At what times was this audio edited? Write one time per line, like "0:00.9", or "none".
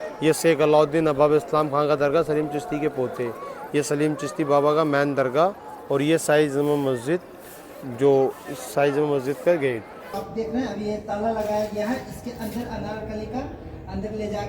0:10.2